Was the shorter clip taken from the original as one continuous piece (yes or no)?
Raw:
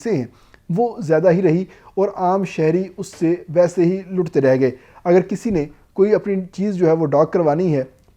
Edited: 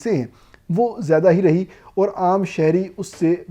yes